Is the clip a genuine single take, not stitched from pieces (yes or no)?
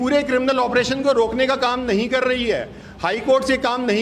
yes